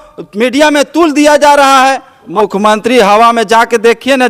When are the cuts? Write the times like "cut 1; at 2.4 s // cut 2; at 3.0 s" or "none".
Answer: cut 1; at 2.2 s